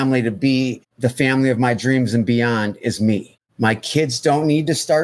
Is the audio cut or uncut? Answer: cut